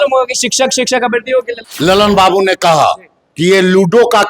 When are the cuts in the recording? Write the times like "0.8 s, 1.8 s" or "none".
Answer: 1.6 s